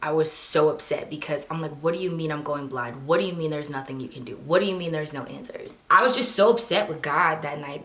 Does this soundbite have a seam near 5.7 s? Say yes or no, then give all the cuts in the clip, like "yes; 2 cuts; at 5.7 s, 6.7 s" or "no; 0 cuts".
yes; 1 cut; at 5.7 s